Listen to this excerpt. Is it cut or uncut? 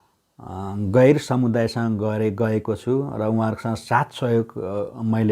uncut